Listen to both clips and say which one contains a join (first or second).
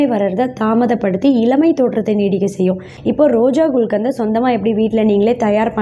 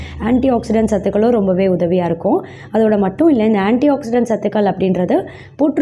first